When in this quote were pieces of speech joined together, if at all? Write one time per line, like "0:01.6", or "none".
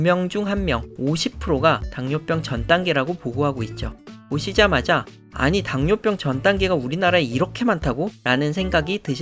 none